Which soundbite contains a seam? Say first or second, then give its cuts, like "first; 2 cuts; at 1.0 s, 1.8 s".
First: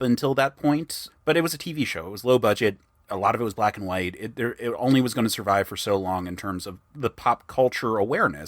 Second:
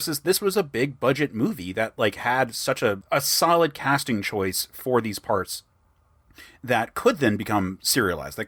first; 1 cut; at 1.0 s